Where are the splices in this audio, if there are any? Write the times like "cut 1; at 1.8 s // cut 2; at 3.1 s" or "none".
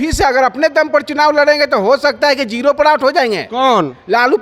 none